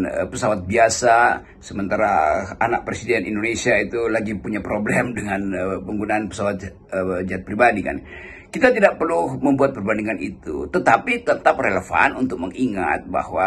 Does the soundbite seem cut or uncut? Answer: uncut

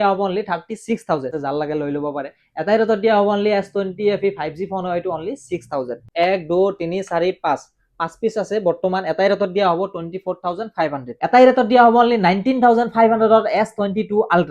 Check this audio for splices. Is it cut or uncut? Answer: cut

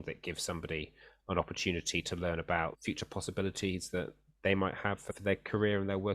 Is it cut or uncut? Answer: cut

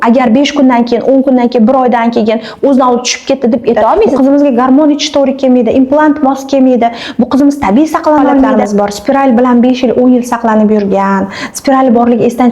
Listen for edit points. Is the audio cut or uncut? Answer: cut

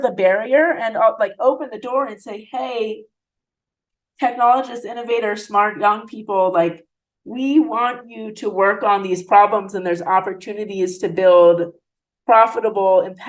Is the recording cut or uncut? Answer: uncut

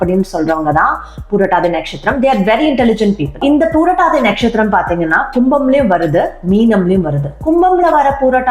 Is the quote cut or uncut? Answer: cut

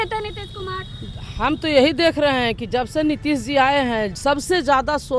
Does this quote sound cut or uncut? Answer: cut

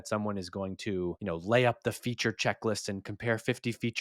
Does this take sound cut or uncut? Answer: cut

